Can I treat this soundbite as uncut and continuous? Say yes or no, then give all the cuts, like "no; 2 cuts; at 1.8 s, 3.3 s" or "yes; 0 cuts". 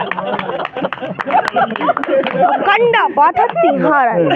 yes; 0 cuts